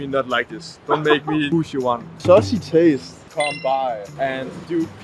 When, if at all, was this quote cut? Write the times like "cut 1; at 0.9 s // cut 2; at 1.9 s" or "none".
cut 1; at 2.1 s // cut 2; at 3.2 s